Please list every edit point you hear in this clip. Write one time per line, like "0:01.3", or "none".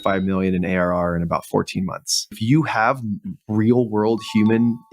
0:02.4